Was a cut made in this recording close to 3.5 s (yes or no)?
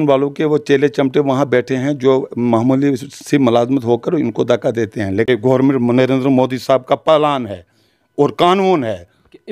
no